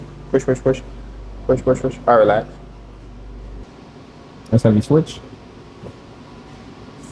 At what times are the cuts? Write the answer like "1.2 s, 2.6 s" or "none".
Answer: 3.6 s

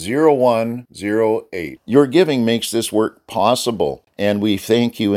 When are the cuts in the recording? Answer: 4.0 s

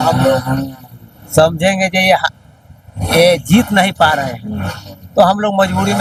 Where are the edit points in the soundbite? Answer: none

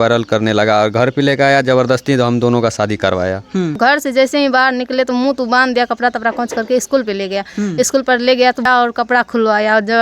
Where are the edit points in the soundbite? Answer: 3.8 s, 8.7 s

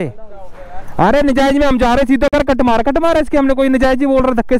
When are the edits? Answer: none

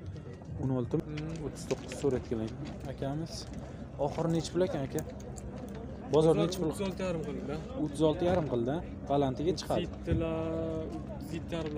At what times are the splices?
1.0 s

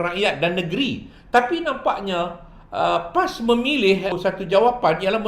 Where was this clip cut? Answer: 4.1 s

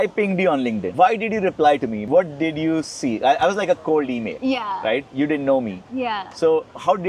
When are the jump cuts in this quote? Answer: 0.9 s

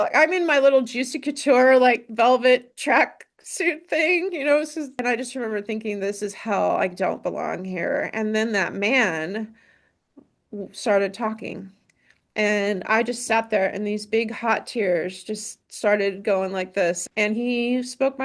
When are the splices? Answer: 5.0 s, 17.0 s

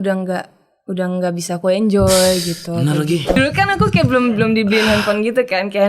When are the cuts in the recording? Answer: 3.3 s

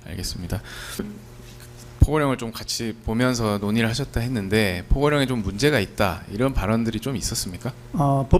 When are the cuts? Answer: 1.0 s

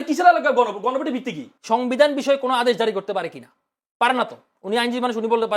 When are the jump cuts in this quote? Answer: 1.5 s

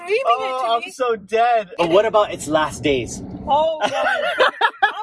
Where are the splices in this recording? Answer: 1.7 s

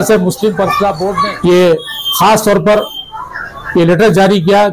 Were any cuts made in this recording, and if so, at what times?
1.1 s

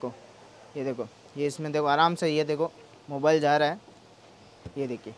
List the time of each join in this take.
none

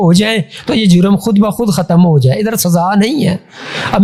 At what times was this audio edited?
none

